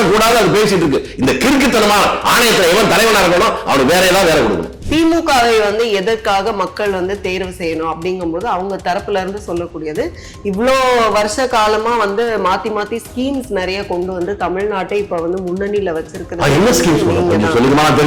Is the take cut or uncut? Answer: uncut